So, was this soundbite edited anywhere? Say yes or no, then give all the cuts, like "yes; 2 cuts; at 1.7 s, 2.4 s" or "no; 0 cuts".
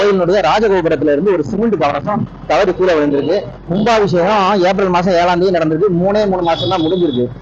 yes; 1 cut; at 3.5 s